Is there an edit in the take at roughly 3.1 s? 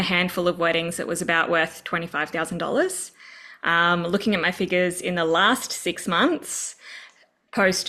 no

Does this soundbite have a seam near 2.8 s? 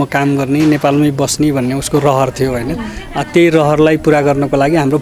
no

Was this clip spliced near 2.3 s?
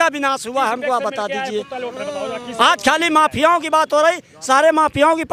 no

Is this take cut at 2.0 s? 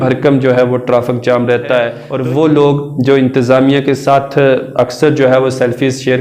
yes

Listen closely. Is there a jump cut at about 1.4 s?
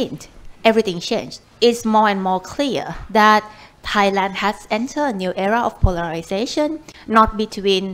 yes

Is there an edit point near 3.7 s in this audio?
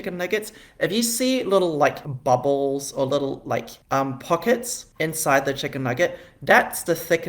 yes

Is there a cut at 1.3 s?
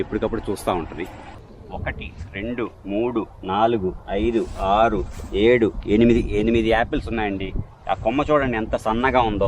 yes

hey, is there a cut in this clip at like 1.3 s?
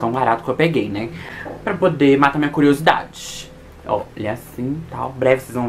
no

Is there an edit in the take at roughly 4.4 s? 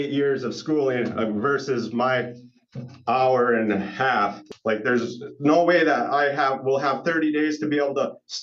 yes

